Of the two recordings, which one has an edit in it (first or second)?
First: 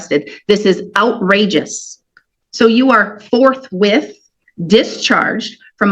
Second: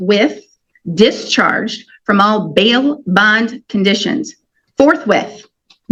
first